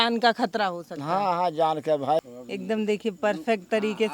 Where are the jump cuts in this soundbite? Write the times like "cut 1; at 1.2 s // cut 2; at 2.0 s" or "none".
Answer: cut 1; at 2.3 s